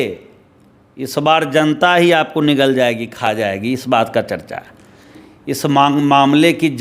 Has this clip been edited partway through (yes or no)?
yes